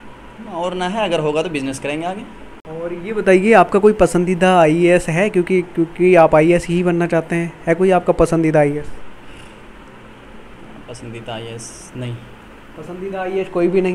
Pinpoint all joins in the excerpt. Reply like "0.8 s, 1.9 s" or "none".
none